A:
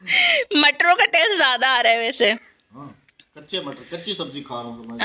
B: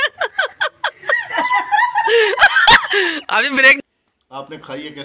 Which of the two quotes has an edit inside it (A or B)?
B